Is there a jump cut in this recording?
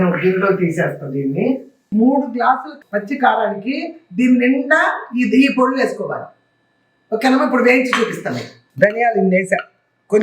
yes; 1 cut; at 1.7 s

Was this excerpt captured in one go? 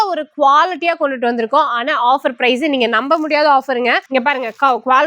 no; 1 cut; at 4.0 s

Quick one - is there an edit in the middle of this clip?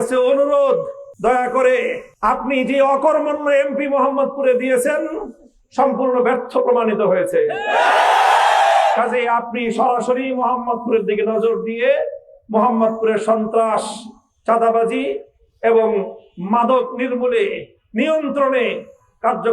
yes; 2 cuts; at 1.0 s, 2.0 s

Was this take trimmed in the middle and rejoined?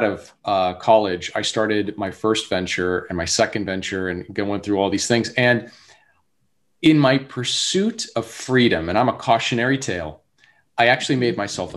no; 0 cuts

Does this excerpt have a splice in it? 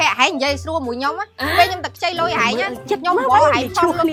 no; 0 cuts

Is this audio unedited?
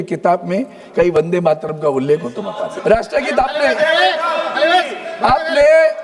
no; 1 cut; at 2.7 s

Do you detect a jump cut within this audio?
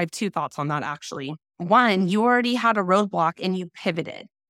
yes; 1 cut; at 1.4 s

